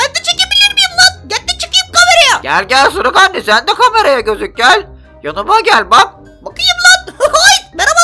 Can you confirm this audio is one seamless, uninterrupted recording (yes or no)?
no